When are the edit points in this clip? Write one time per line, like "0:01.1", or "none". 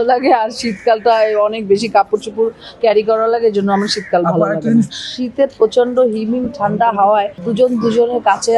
0:04.9
0:07.4